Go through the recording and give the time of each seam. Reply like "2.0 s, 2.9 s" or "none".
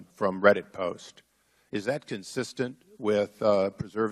2.3 s